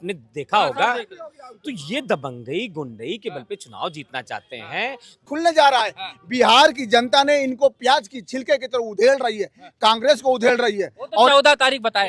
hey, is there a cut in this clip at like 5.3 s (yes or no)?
yes